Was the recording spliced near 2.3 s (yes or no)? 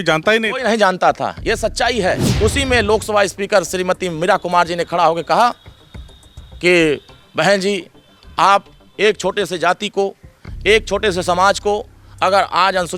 yes